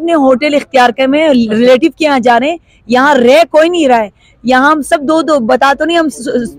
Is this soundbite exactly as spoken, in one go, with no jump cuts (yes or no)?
yes